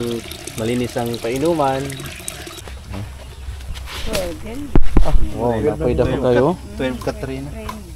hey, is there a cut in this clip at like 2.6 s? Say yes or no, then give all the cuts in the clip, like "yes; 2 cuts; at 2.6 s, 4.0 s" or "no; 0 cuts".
yes; 1 cut; at 2.6 s